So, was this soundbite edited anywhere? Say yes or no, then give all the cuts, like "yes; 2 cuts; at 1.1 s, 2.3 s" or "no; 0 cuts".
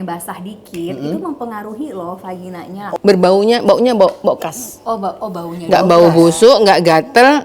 yes; 1 cut; at 3.0 s